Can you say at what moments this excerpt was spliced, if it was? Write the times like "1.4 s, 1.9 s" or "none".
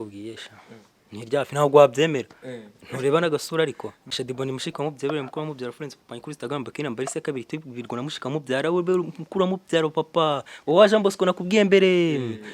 4.1 s